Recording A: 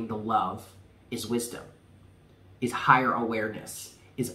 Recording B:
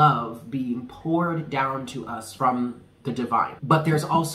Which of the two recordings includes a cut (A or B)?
B